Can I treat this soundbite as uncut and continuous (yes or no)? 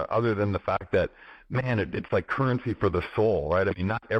yes